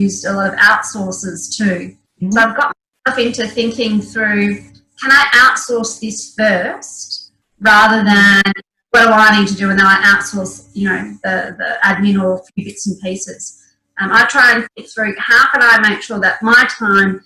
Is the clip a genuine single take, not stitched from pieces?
yes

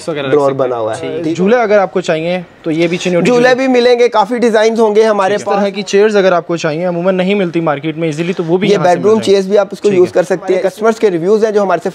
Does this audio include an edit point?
yes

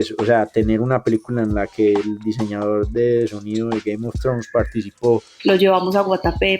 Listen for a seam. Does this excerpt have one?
yes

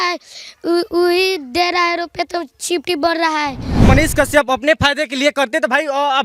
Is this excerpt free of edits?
no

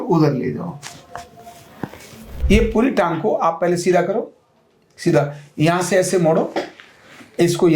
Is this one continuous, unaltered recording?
no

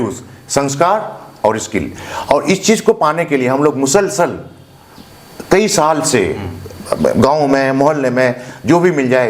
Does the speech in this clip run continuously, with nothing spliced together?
yes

